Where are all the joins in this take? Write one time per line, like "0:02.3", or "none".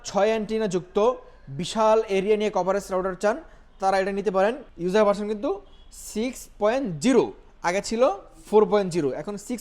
0:04.7